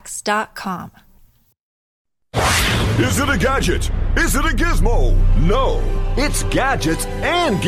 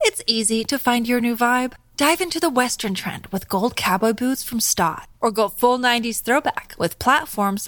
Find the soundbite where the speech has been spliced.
first; 1 cut; at 2.0 s

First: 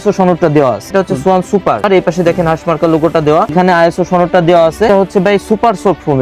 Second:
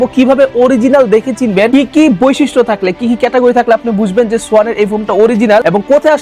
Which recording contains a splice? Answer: first; 4 cuts; at 0.9 s, 1.8 s, 3.5 s, 4.9 s

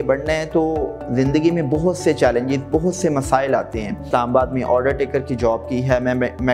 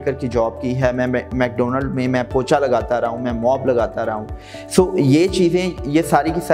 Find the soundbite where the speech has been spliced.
first; 1 cut; at 4.0 s

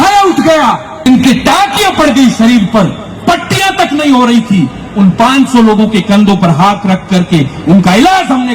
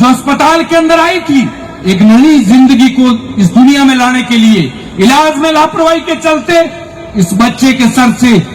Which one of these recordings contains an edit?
first; 1 cut; at 1.1 s

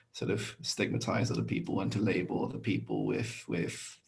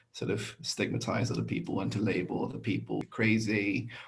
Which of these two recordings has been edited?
second; 1 cut; at 3.0 s

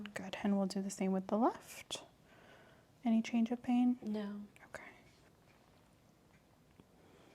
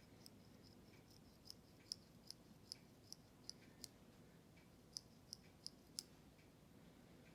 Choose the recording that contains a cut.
first; 1 cut; at 5.3 s

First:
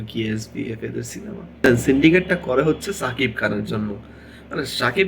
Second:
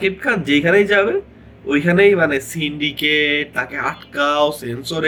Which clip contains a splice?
first; 1 cut; at 1.6 s

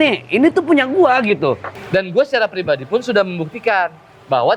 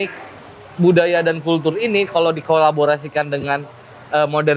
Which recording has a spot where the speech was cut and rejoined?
first; 1 cut; at 1.7 s

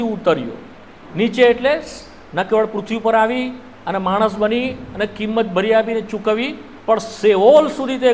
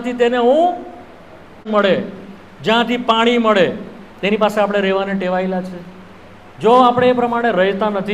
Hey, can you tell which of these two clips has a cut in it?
second; 1 cut; at 1.7 s

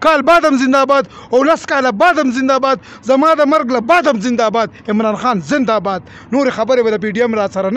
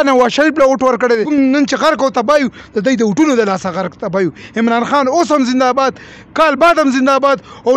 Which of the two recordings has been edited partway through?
second; 1 cut; at 1.3 s

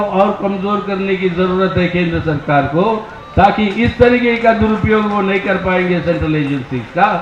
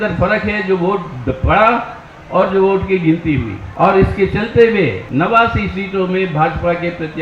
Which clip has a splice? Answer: second; 2 cuts; at 3.6 s, 5.0 s

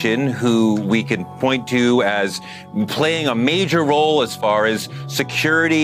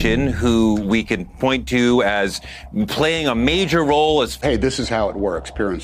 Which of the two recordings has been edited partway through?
second; 1 cut; at 4.4 s

